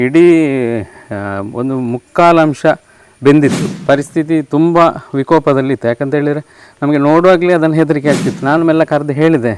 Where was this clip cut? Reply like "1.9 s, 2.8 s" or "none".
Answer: 3.7 s, 8.3 s